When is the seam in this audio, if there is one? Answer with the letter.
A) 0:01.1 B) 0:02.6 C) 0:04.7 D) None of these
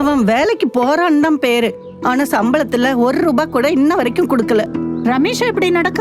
C